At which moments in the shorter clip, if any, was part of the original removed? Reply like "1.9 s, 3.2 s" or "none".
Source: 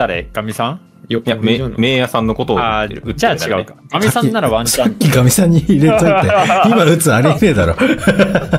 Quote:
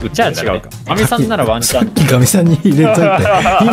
none